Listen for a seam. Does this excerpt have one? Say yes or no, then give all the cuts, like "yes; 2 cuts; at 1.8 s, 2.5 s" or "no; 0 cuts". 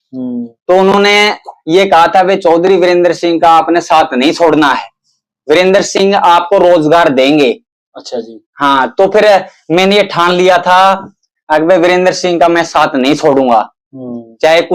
no; 0 cuts